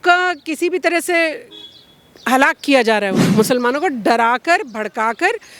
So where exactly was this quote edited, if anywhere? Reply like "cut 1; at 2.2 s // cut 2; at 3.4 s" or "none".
cut 1; at 3.2 s

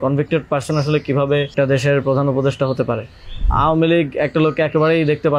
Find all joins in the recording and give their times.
cut 1; at 1.5 s // cut 2; at 3.5 s

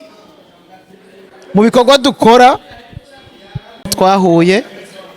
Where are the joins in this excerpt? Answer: cut 1; at 3.9 s

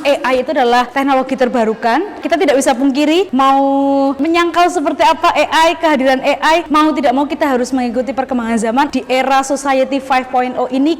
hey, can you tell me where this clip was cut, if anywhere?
cut 1; at 0.9 s // cut 2; at 2.2 s // cut 3; at 4.2 s // cut 4; at 6.7 s // cut 5; at 8.9 s

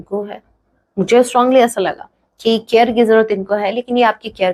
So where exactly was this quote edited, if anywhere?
none

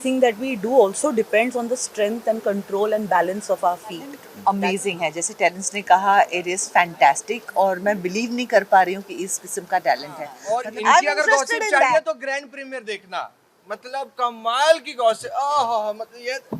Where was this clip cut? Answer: cut 1; at 4.3 s // cut 2; at 10.4 s

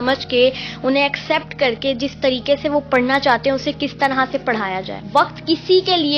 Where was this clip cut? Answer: cut 1; at 4.9 s

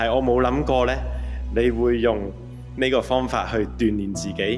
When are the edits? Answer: none

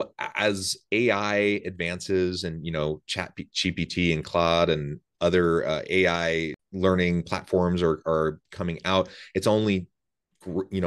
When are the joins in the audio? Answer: cut 1; at 6.6 s

